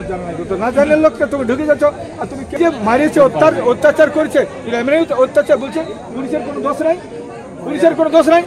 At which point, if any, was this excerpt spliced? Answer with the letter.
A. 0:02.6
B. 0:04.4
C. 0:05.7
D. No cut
A